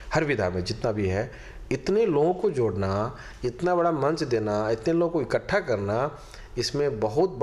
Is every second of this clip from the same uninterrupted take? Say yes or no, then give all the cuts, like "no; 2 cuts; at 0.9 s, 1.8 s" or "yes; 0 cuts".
yes; 0 cuts